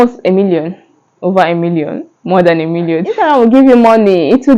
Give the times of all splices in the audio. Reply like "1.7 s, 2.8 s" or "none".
3.1 s